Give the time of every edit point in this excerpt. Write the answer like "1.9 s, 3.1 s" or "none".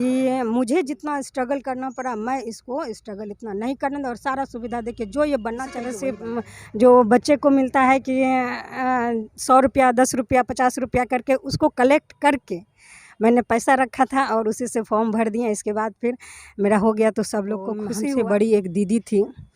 6.2 s, 17.9 s